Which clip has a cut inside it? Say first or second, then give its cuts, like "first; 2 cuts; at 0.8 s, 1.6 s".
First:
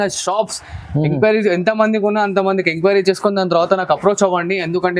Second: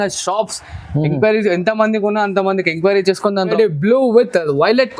second; 1 cut; at 3.5 s